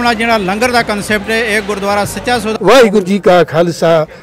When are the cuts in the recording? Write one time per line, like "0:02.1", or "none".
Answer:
0:02.6